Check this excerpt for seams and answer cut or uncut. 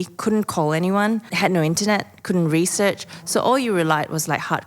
cut